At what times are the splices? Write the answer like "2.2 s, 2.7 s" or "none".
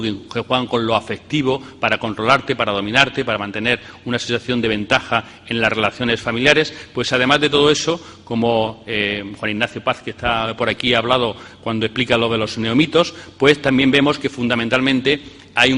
none